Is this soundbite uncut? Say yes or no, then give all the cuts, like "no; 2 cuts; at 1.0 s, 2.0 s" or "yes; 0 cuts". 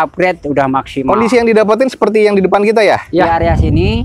no; 2 cuts; at 1.0 s, 3.3 s